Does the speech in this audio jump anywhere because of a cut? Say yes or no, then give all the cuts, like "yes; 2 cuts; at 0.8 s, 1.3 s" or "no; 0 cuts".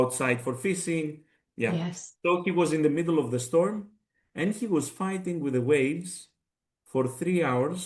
no; 0 cuts